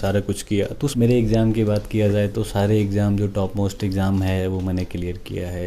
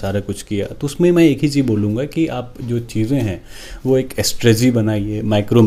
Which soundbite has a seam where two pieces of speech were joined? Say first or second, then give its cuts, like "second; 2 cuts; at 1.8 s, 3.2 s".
first; 1 cut; at 0.9 s